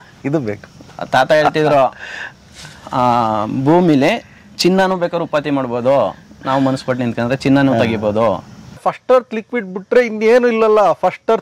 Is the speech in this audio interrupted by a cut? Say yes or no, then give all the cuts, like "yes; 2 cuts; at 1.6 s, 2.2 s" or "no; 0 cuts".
yes; 1 cut; at 8.7 s